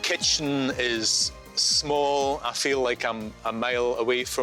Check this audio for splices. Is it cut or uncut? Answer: uncut